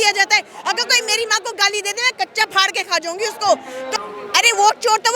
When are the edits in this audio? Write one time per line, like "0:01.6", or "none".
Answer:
0:03.9